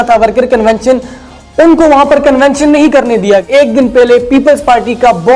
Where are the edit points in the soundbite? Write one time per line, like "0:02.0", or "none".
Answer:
0:03.5